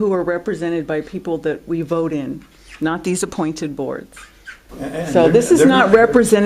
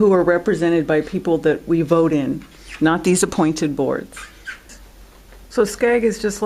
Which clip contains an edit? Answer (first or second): second